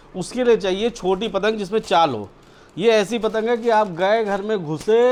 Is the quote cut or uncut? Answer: uncut